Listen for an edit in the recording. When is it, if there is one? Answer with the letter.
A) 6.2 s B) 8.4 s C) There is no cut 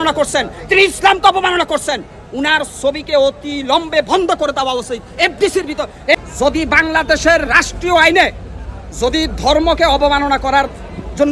A